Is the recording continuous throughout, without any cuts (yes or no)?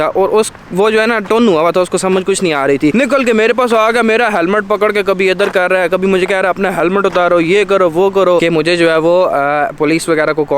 no